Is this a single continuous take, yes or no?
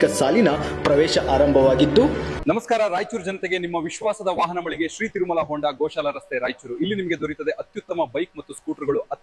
no